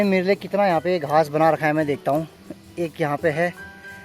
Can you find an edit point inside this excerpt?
no; 0 cuts

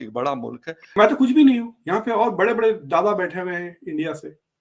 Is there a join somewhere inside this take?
yes; 1 cut; at 0.9 s

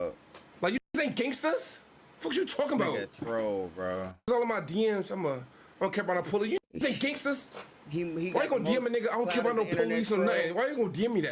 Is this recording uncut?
yes; 0 cuts

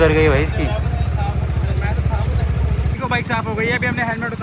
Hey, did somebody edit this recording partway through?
yes; 1 cut; at 3.0 s

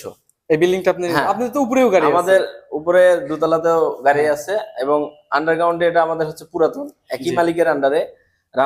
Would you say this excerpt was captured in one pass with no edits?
yes; 0 cuts

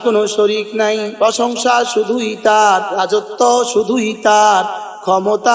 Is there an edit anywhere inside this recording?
yes; 2 cuts; at 1.1 s, 2.9 s

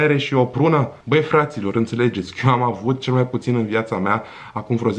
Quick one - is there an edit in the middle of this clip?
yes; 1 cut; at 0.9 s

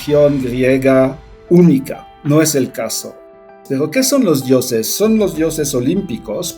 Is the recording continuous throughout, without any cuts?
no; 2 cuts; at 1.3 s, 3.4 s

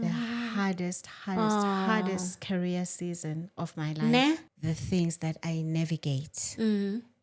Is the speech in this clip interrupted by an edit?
yes; 1 cut; at 4.5 s

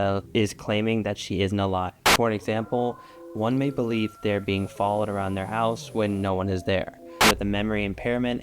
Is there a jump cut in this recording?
yes; 2 cuts; at 2.0 s, 7.2 s

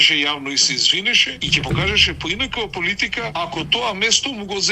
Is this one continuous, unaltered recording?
no; 2 cuts; at 1.3 s, 3.3 s

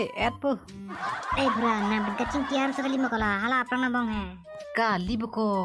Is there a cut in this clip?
yes; 1 cut; at 1.0 s

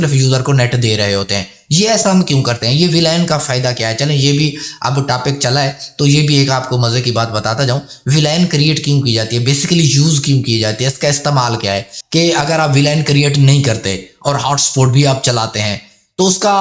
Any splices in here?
yes; 1 cut; at 11.9 s

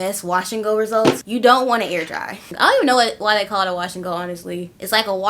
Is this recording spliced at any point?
yes; 2 cuts; at 1.3 s, 2.5 s

